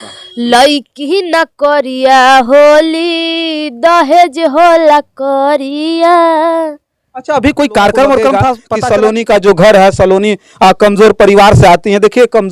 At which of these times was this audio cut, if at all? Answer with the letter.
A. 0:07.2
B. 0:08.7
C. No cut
B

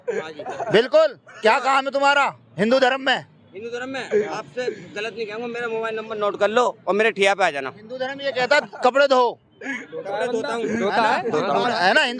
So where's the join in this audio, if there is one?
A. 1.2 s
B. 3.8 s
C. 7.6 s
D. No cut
D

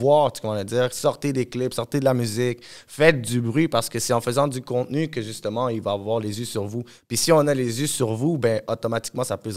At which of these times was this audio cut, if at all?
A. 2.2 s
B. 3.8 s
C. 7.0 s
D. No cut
D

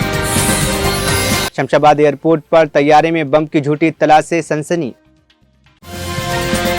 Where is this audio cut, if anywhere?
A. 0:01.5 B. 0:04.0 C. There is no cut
A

